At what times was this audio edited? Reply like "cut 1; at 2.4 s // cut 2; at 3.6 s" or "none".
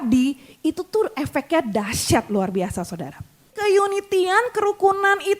cut 1; at 3.6 s